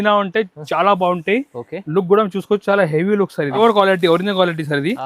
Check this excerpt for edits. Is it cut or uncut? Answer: cut